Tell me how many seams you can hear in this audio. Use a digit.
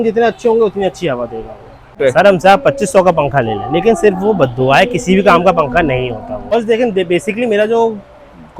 2